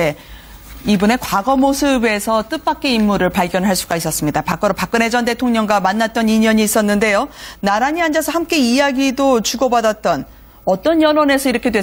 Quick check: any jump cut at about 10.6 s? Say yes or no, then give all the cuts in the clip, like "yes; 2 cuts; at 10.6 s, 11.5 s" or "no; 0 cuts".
no; 0 cuts